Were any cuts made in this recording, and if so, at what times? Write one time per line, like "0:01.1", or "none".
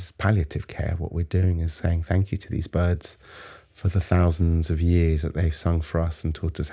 none